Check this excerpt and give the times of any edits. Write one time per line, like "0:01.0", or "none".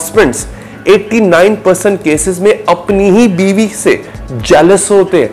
none